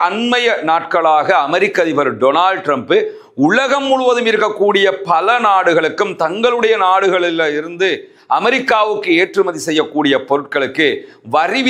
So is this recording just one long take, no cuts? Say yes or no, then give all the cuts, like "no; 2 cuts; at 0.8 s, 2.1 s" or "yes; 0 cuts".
yes; 0 cuts